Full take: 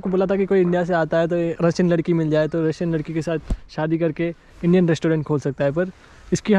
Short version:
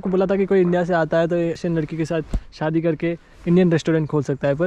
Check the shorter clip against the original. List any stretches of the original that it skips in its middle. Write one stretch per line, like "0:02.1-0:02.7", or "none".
0:01.6-0:02.7